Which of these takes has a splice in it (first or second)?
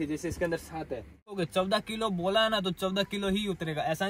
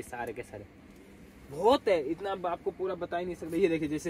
first